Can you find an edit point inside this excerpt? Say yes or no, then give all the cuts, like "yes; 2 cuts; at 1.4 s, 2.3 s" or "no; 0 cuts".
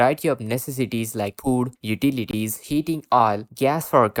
no; 0 cuts